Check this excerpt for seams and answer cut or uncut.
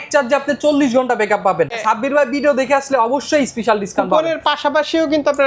cut